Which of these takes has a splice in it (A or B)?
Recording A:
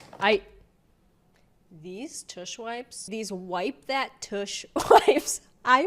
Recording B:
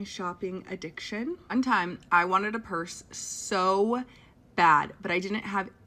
A